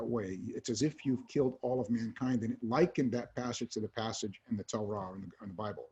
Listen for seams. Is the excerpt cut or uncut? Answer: uncut